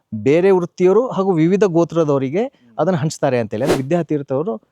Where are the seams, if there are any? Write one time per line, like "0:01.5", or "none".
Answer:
0:03.7